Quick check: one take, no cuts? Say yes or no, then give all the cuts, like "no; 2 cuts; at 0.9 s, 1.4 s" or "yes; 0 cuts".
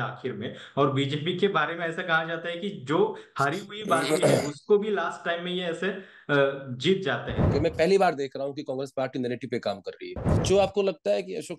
no; 2 cuts; at 7.4 s, 10.4 s